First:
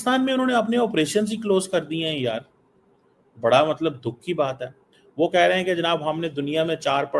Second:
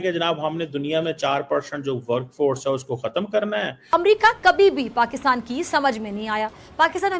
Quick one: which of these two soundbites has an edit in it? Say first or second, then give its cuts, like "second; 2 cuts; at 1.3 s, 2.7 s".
second; 1 cut; at 3.9 s